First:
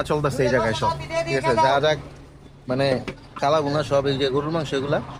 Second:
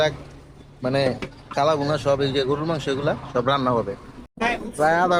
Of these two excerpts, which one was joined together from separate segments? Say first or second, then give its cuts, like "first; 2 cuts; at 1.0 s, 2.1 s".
second; 1 cut; at 4.3 s